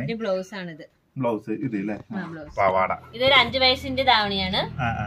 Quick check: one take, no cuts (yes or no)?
no